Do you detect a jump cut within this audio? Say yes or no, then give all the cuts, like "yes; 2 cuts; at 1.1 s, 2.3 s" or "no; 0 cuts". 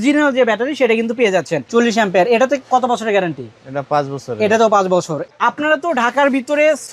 yes; 2 cuts; at 1.6 s, 5.3 s